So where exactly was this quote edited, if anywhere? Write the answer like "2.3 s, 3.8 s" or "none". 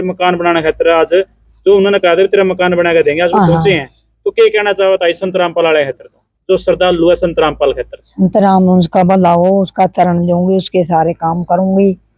none